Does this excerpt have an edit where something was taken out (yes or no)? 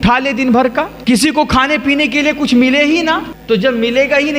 yes